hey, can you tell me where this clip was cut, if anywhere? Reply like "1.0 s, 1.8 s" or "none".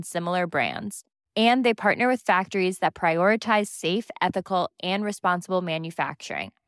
none